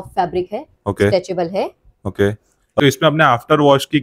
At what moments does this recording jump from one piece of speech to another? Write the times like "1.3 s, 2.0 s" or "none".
2.8 s